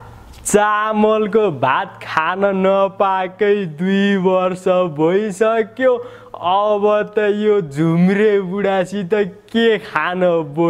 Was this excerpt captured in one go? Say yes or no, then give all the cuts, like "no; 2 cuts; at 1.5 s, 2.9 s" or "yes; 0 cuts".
yes; 0 cuts